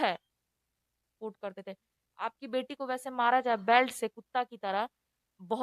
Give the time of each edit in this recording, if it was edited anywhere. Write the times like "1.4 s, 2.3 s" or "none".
1.1 s